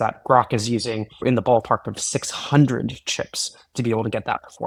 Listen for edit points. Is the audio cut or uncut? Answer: uncut